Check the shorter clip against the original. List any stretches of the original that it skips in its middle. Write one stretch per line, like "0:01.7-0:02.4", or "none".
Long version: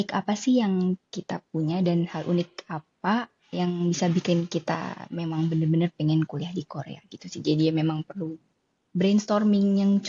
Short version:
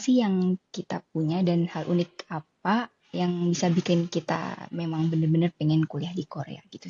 none